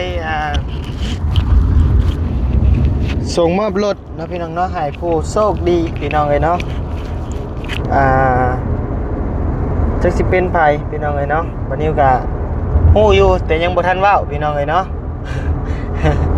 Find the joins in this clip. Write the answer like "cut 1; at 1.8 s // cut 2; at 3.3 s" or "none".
none